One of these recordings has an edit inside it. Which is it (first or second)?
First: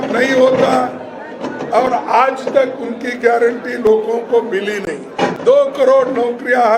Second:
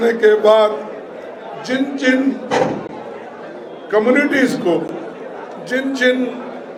first